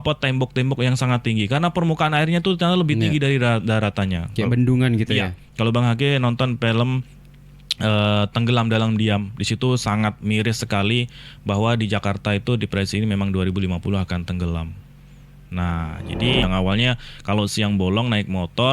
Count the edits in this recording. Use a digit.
1